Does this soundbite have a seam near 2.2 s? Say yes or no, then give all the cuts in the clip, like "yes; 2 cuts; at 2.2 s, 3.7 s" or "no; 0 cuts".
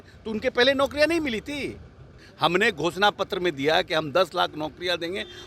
yes; 1 cut; at 2.2 s